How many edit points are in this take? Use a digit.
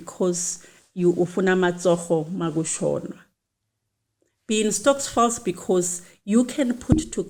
0